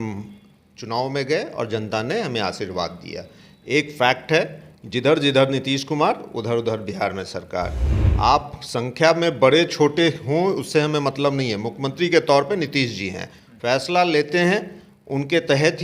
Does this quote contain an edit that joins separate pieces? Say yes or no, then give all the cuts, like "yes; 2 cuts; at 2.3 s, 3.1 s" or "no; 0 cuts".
no; 0 cuts